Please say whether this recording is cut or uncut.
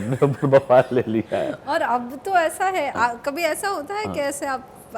uncut